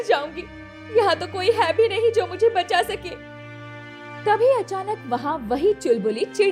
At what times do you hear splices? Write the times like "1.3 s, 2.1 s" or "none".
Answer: none